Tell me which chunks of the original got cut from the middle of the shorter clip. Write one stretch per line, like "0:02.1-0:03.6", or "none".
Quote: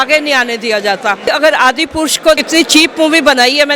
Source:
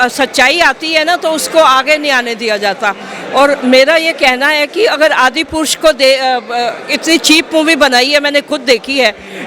0:03.1-0:04.9
0:06.0-0:06.9